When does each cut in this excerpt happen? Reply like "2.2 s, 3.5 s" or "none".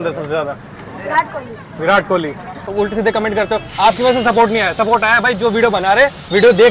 2.7 s